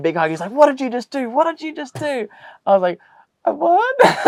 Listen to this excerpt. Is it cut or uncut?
uncut